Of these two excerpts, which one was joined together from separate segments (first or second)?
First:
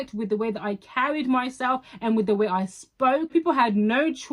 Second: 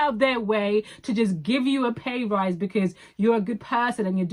first